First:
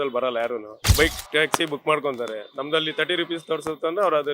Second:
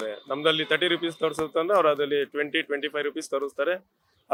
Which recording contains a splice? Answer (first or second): first